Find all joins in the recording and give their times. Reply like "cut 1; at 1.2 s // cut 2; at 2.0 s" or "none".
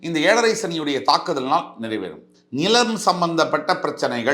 cut 1; at 2.4 s